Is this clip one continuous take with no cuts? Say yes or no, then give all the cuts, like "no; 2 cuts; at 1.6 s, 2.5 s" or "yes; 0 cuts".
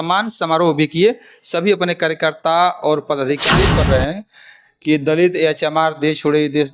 no; 1 cut; at 3.6 s